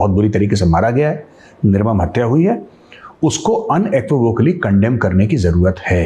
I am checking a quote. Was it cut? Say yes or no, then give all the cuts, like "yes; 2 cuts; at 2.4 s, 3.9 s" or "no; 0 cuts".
no; 0 cuts